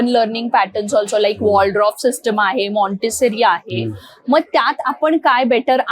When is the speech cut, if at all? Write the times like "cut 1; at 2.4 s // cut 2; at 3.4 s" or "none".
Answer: none